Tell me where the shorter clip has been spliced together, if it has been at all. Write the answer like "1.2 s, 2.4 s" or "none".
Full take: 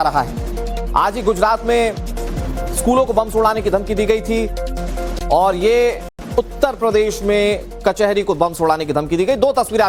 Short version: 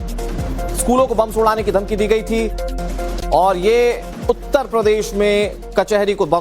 4.1 s